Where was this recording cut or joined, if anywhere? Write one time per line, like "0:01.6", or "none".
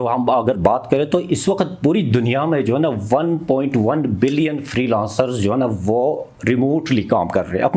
none